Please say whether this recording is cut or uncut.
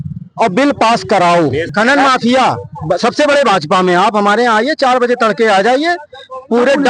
cut